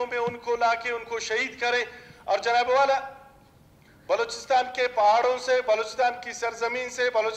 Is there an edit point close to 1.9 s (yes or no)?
no